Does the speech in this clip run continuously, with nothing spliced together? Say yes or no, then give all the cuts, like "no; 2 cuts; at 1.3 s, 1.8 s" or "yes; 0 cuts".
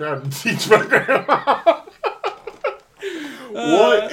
yes; 0 cuts